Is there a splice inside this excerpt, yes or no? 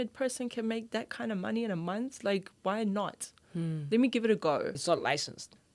yes